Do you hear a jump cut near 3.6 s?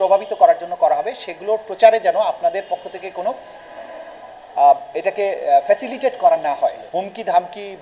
no; 1 cut; at 6.9 s

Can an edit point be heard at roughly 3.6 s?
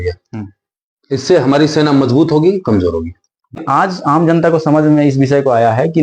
yes; 1 cut; at 3.6 s

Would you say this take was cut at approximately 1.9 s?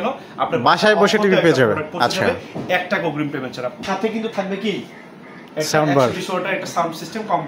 no; 1 cut; at 3.9 s

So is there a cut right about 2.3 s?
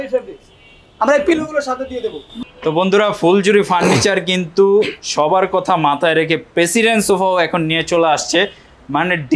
yes; 1 cut; at 2.3 s

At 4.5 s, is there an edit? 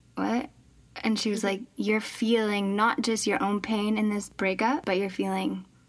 yes; 1 cut; at 4.5 s

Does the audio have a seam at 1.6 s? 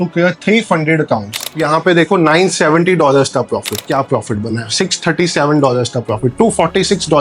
yes; 2 cuts; at 1.6 s, 3.9 s

